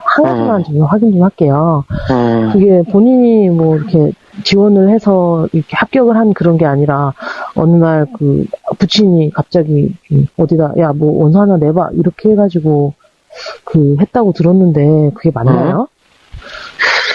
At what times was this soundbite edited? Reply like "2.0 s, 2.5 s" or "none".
11.2 s